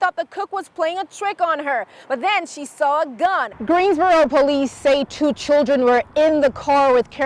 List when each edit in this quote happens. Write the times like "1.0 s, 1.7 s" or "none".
3.5 s